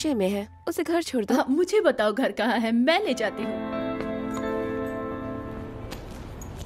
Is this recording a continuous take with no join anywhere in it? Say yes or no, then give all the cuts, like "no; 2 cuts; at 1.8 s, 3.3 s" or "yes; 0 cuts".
no; 2 cuts; at 3.4 s, 5.7 s